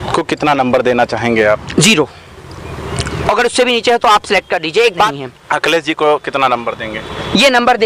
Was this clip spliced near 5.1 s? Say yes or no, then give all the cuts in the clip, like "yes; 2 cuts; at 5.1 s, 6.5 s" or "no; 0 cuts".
yes; 1 cut; at 5.1 s